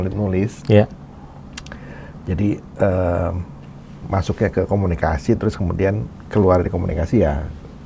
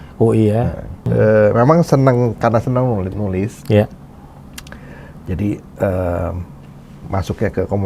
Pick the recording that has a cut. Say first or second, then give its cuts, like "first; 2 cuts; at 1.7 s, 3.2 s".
second; 1 cut; at 1.0 s